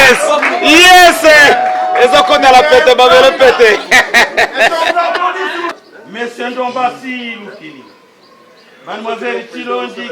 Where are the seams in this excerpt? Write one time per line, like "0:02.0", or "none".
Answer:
0:05.8